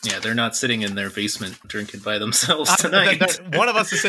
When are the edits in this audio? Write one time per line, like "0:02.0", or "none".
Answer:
0:01.6